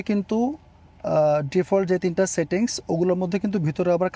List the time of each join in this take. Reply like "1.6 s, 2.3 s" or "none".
none